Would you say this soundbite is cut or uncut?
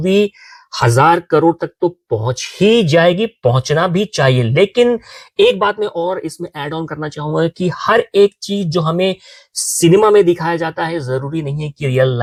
uncut